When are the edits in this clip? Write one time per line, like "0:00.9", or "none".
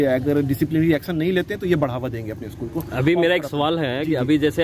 none